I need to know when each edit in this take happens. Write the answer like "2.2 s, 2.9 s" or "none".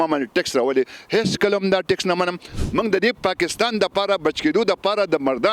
2.6 s